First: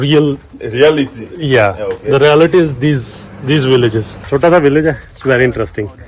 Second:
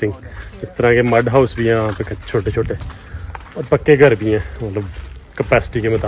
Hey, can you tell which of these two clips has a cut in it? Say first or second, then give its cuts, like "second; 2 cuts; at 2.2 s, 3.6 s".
first; 1 cut; at 4.1 s